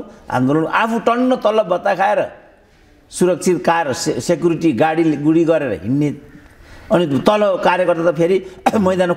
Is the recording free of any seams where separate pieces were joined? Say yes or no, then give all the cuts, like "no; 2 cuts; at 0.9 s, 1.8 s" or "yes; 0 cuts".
yes; 0 cuts